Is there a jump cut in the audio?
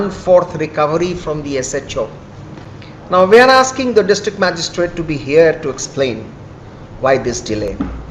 no; 0 cuts

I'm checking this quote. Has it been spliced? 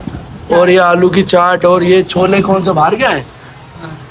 no; 0 cuts

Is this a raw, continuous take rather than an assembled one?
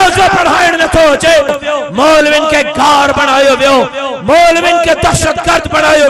no; 1 cut; at 1.5 s

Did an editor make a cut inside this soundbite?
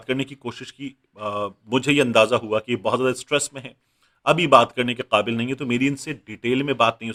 no; 0 cuts

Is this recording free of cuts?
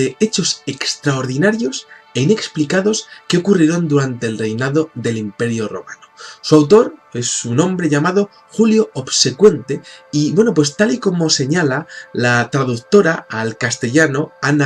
no; 1 cut; at 11.2 s

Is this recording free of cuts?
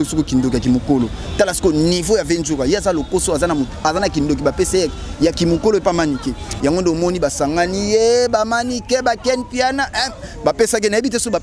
no; 1 cut; at 6.5 s

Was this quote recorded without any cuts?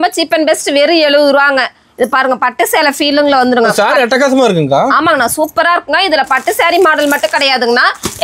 yes; 0 cuts

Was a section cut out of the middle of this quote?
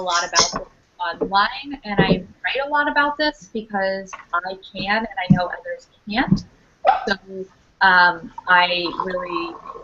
yes; 1 cut; at 2.8 s

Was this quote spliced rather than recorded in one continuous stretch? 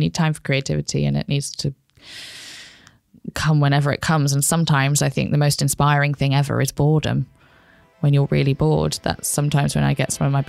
no; 0 cuts

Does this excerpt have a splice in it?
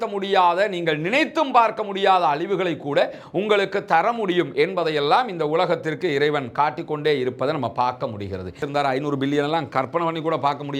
yes; 1 cut; at 8.6 s

